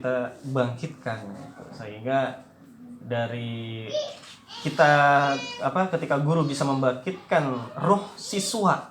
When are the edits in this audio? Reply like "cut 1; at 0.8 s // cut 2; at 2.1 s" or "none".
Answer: none